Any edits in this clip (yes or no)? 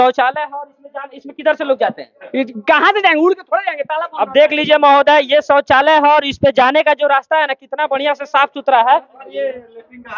no